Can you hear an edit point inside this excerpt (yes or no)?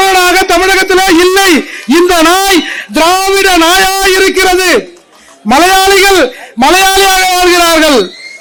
no